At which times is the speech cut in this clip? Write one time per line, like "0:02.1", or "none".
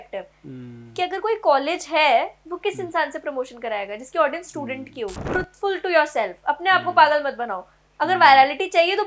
0:05.2

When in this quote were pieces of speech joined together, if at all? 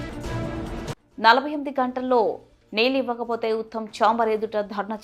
none

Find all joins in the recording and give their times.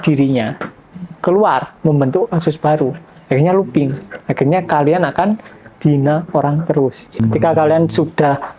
0:07.2

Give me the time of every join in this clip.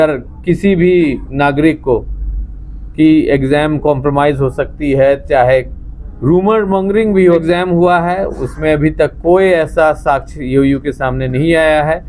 0:07.4

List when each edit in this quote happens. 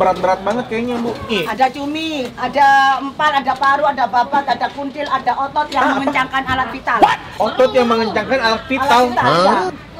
0:01.3

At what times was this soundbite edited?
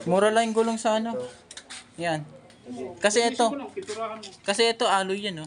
0:02.3

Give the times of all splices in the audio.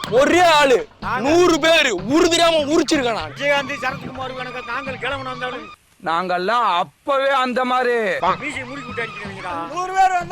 none

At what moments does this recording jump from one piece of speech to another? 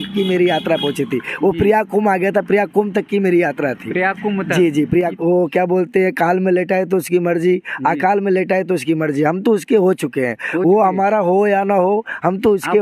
0:05.1

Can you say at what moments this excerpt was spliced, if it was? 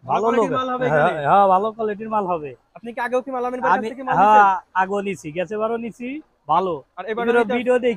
none

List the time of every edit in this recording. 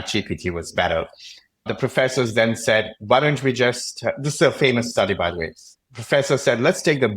0:01.7

